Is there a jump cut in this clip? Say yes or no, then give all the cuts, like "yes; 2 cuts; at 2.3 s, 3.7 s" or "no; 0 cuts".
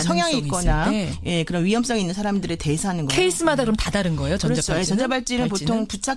no; 0 cuts